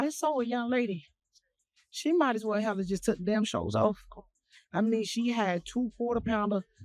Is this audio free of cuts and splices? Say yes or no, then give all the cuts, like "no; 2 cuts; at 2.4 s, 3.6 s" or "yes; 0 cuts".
yes; 0 cuts